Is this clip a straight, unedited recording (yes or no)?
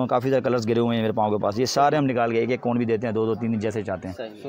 yes